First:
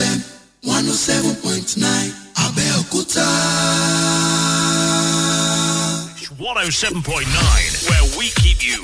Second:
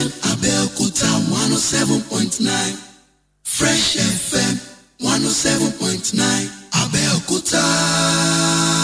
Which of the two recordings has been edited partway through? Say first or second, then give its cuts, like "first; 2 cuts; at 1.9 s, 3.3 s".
first; 1 cut; at 6.2 s